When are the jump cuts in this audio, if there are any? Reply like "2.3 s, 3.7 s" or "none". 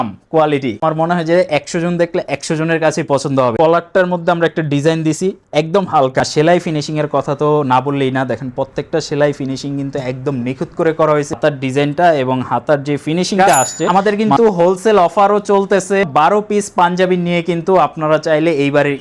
0.8 s, 3.5 s, 6.2 s, 11.3 s, 13.9 s, 16.1 s